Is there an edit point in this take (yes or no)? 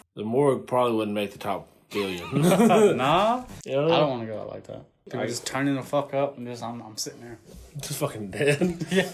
yes